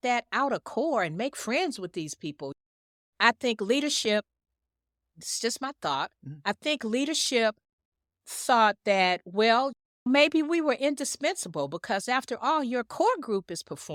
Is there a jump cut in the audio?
no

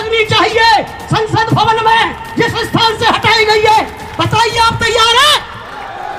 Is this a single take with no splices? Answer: yes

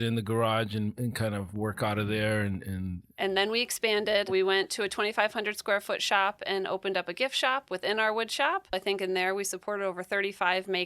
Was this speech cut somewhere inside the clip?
yes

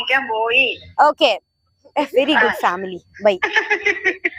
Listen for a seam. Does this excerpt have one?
no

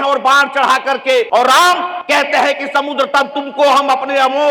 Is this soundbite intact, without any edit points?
no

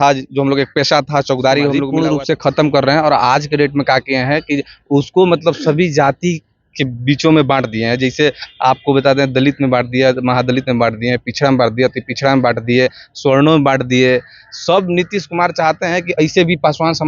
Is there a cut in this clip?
yes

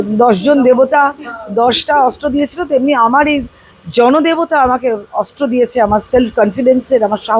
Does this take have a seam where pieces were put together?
no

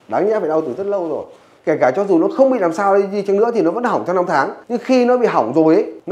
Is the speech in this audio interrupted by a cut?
yes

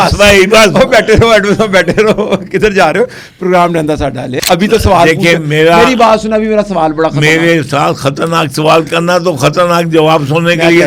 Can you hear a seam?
yes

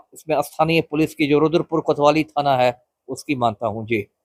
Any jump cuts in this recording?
no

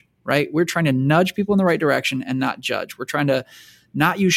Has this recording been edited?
no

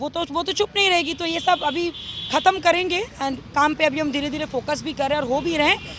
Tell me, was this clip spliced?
no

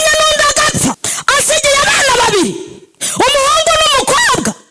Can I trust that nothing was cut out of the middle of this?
no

